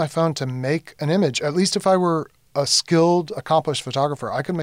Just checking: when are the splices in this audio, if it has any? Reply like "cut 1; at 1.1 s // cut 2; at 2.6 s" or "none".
none